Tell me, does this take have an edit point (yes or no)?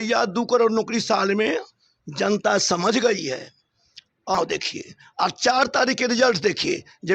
yes